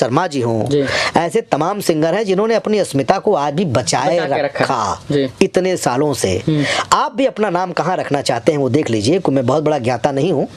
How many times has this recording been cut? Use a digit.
0